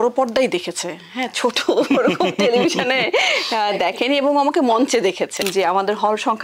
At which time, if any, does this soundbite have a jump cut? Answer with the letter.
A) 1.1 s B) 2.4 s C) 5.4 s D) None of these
C